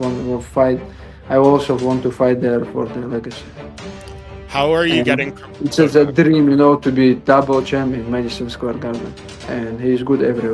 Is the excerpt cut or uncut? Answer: cut